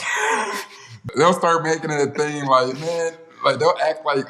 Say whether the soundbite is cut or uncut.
cut